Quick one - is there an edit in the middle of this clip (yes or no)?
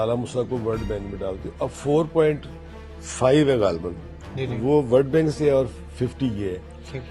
no